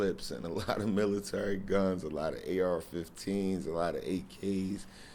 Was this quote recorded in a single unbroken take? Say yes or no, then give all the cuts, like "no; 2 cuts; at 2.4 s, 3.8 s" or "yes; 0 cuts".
yes; 0 cuts